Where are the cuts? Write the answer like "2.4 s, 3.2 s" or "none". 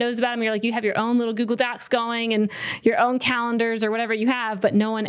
none